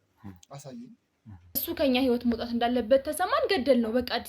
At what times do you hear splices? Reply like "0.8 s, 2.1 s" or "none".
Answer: 1.6 s

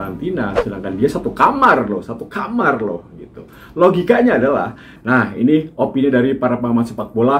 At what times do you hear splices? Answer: 4.9 s

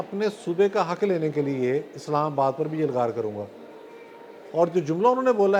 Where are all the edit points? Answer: none

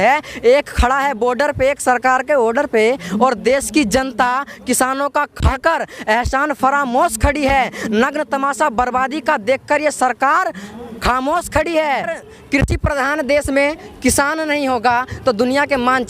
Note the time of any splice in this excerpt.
12.2 s

